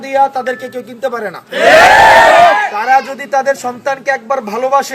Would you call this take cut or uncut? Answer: uncut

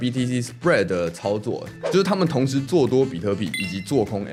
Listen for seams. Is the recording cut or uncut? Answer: uncut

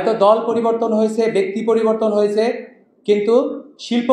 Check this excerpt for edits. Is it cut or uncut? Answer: uncut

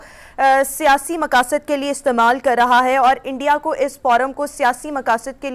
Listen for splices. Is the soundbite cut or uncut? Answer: uncut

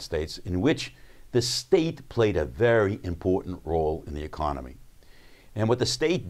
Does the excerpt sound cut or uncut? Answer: uncut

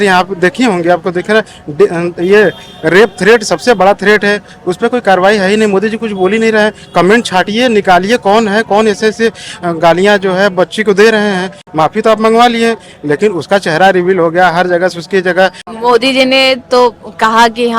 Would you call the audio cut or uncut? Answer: uncut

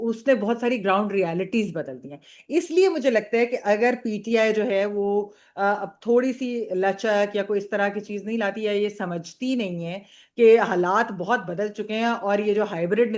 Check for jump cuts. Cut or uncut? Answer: uncut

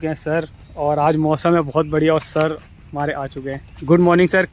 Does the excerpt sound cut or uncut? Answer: uncut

